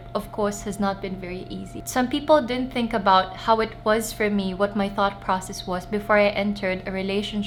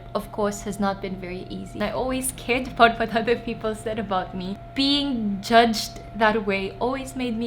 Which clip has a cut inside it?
second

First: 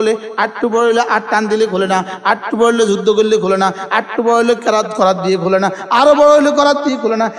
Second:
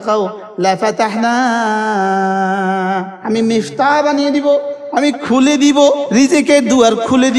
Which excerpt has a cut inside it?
second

